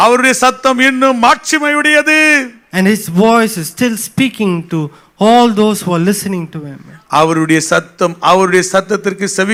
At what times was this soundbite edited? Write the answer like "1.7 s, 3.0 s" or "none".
none